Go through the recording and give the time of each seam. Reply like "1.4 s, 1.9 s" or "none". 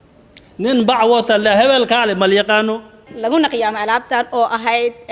3.1 s